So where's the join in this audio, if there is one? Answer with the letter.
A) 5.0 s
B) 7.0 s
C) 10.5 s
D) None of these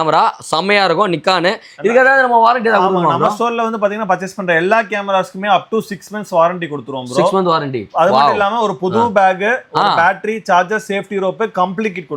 D